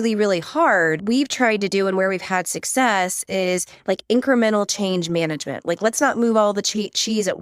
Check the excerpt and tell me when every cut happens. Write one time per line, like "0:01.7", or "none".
0:01.0